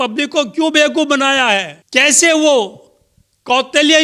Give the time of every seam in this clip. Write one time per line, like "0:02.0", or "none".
0:01.8